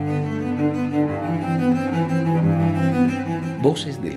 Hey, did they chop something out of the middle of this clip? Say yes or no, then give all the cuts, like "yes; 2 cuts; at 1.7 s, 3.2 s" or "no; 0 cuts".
no; 0 cuts